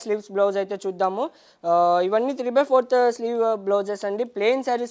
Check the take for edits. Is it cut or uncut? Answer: uncut